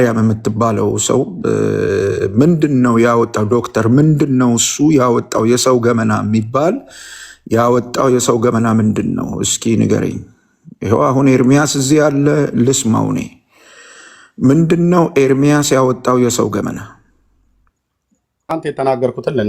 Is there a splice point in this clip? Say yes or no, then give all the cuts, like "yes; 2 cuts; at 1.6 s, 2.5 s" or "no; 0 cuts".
yes; 1 cut; at 18.5 s